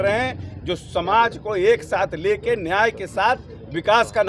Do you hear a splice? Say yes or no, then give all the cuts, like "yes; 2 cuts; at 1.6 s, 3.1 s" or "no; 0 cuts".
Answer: no; 0 cuts